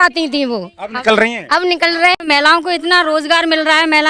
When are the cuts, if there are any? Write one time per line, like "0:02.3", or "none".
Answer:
0:02.2